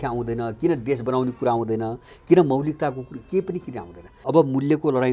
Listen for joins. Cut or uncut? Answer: cut